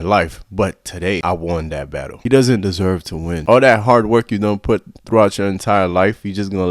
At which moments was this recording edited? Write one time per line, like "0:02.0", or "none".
0:02.1

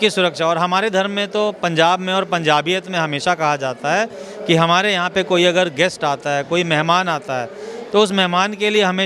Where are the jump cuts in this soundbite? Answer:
none

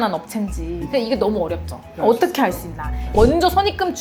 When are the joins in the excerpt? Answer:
0:03.1

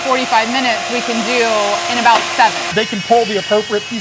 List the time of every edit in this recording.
0:02.7

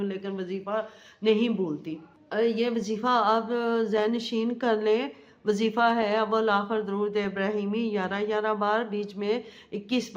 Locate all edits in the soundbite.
none

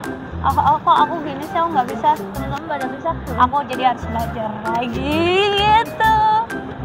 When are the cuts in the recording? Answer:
none

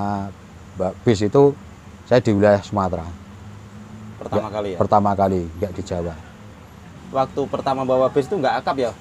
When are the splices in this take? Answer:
none

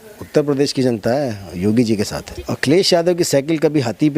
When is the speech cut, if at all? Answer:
0:02.2

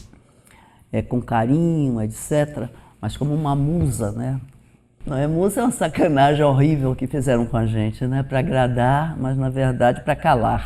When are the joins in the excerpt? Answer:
0:05.0

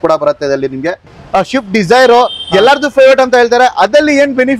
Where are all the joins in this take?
0:01.2

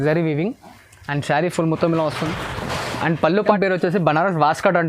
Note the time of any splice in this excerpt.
0:03.5

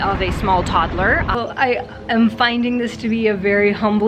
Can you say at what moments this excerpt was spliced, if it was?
0:01.3

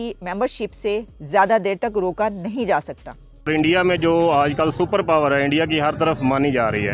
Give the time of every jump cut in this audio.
0:03.5

